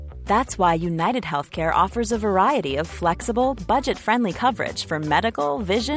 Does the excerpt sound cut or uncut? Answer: uncut